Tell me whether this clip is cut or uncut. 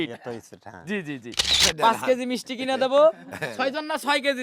cut